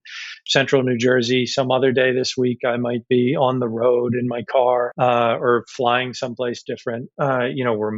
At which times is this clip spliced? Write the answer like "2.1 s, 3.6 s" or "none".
4.9 s